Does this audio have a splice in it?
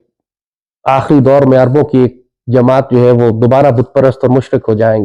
no; 0 cuts

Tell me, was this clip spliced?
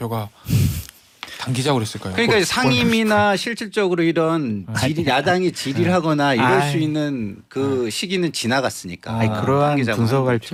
no; 0 cuts

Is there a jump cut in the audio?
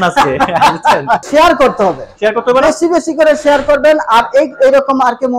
yes; 1 cut; at 1.2 s

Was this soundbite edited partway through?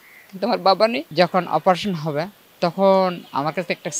yes; 2 cuts; at 1.1 s, 2.4 s

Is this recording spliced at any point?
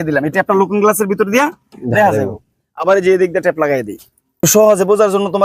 yes; 1 cut; at 4.5 s

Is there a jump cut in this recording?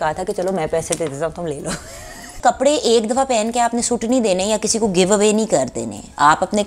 yes; 1 cut; at 2.4 s

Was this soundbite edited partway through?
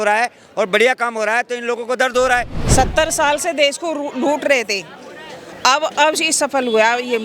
yes; 1 cut; at 2.6 s

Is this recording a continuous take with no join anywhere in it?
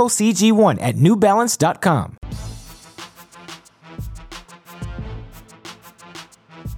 no; 2 cuts; at 2.2 s, 4.6 s

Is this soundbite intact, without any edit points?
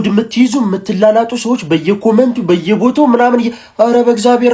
yes; 0 cuts

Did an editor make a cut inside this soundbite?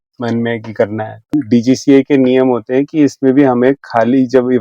yes; 1 cut; at 1.2 s

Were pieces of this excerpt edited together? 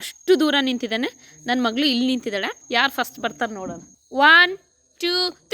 yes; 1 cut; at 2.6 s

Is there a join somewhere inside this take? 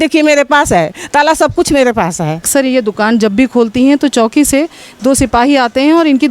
yes; 1 cut; at 2.5 s

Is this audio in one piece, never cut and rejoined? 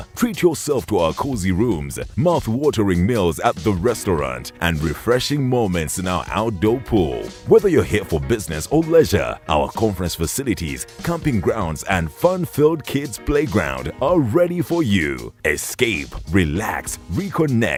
yes; 0 cuts

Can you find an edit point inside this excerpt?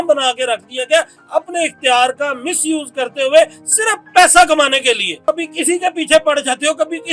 yes; 2 cuts; at 1.2 s, 5.1 s

